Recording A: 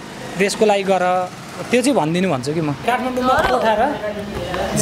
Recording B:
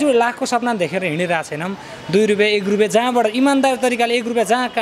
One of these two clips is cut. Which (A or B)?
A